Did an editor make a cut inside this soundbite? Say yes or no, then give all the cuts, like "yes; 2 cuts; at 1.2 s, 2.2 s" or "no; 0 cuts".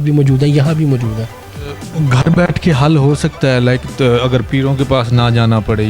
yes; 1 cut; at 1.8 s